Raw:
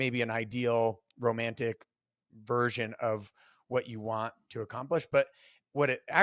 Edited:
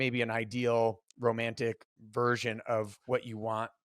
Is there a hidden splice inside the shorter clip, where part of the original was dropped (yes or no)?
yes